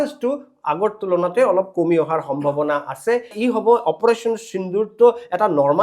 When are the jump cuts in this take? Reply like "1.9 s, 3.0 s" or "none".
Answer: 3.3 s